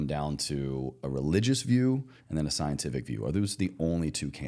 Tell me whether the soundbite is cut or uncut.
uncut